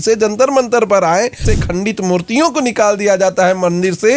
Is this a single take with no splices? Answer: no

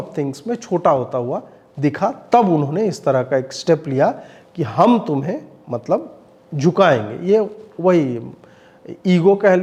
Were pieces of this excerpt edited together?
no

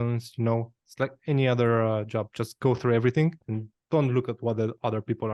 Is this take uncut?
no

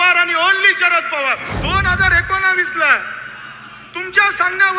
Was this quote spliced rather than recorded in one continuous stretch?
yes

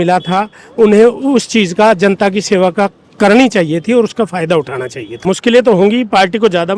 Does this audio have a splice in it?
yes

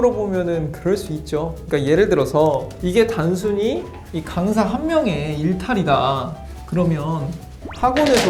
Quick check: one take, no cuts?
yes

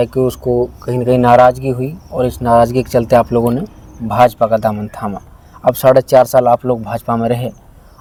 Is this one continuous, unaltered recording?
yes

